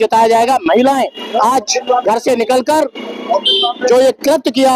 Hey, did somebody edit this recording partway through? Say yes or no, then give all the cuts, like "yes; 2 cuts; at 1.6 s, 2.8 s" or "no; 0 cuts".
no; 0 cuts